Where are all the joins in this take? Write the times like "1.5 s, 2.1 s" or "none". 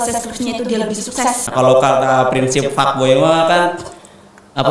1.4 s